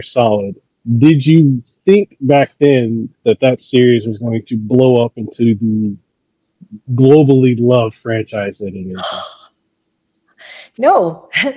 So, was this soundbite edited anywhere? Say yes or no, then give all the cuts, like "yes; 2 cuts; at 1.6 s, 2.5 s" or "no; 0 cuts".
no; 0 cuts